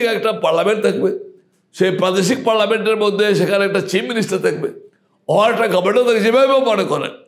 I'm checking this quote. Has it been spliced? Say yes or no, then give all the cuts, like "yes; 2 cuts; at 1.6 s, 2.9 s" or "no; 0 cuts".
no; 0 cuts